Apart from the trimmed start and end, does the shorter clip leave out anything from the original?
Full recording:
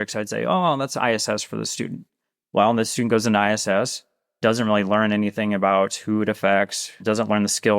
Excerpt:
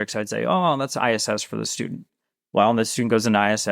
no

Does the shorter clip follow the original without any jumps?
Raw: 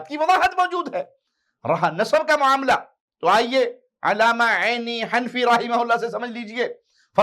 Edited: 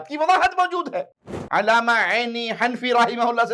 no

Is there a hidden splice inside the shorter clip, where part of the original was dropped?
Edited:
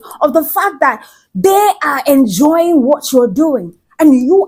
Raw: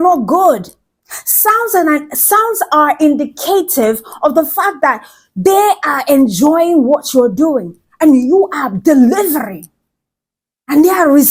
no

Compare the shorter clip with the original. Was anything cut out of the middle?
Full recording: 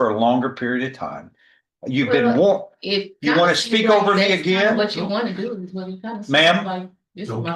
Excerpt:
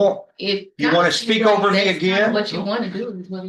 no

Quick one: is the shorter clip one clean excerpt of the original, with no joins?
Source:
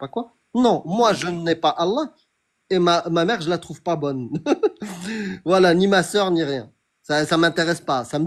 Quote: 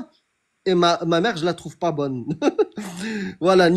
yes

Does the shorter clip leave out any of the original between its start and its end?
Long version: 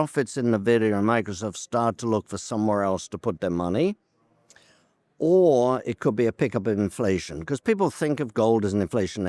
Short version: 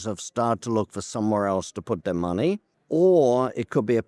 yes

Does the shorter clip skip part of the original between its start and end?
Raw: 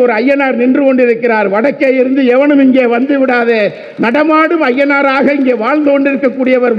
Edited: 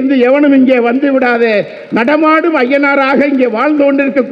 no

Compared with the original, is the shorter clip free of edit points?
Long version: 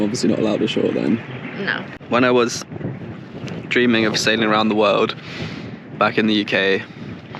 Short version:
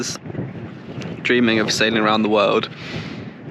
yes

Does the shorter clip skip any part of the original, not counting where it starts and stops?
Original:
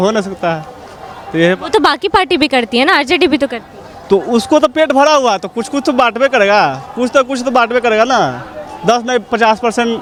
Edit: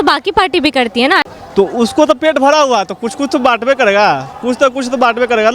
yes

